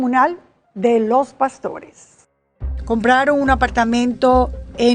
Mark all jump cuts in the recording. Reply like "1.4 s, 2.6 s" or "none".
2.5 s